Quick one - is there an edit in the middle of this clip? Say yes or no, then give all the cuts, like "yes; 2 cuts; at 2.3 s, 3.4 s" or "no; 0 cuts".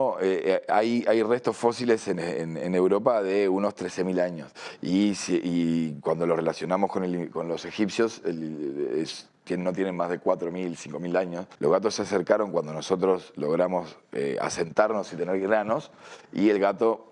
yes; 1 cut; at 11.4 s